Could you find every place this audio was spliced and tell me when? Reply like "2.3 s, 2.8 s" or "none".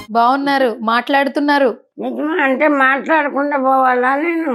none